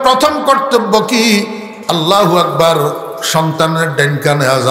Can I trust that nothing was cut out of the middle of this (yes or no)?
yes